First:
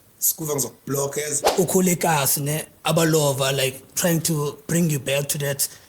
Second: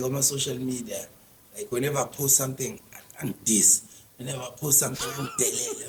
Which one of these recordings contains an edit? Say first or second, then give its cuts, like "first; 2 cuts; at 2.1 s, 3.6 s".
first; 1 cut; at 1.4 s